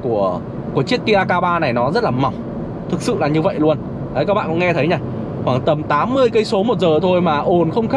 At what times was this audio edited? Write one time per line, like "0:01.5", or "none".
none